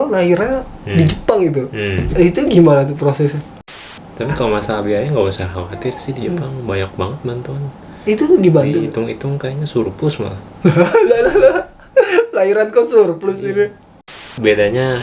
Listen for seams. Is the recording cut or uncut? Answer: cut